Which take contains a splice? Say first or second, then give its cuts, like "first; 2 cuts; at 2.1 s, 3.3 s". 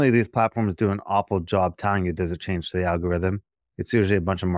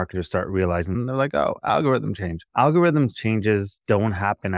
second; 3 cuts; at 0.9 s, 2.3 s, 3.7 s